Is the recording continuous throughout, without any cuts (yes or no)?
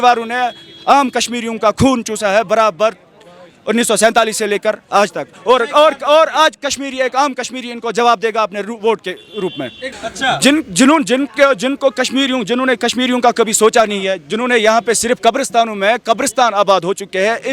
no